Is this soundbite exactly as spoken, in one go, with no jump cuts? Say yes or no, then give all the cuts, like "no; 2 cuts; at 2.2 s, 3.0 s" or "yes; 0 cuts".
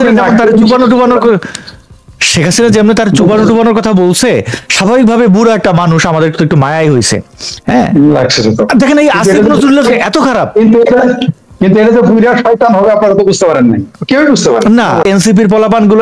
no; 1 cut; at 15.0 s